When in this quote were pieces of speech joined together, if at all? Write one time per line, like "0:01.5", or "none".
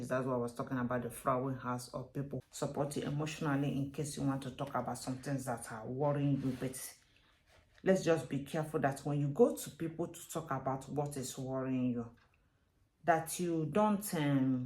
0:02.4